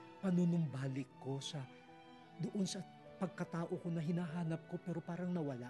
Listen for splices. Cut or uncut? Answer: uncut